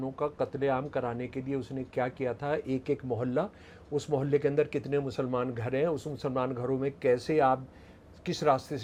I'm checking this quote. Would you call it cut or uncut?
uncut